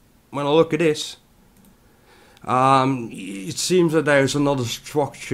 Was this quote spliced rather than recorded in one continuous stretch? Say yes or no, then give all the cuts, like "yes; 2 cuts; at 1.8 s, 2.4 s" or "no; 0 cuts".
yes; 1 cut; at 2.8 s